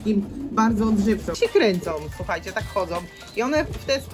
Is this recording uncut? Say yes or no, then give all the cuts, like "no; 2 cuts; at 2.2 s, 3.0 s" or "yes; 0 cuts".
no; 1 cut; at 1.3 s